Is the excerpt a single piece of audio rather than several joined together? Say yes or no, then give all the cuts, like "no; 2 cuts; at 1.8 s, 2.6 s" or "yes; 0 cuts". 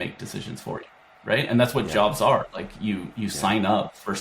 yes; 0 cuts